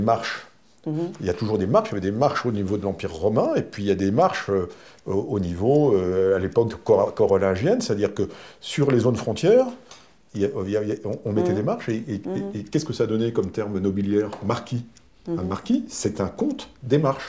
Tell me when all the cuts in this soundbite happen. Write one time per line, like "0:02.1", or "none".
none